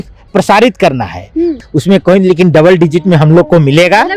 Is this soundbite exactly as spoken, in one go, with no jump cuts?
no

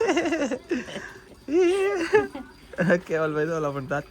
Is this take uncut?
yes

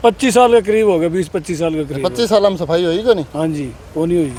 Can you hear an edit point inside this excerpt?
no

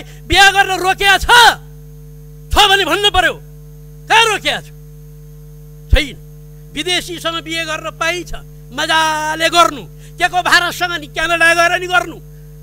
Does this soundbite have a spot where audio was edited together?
no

